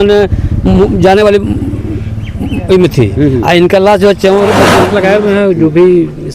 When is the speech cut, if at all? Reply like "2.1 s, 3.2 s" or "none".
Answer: 4.9 s